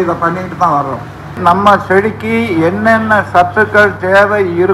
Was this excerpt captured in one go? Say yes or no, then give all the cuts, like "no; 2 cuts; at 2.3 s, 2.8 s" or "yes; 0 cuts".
no; 1 cut; at 1.4 s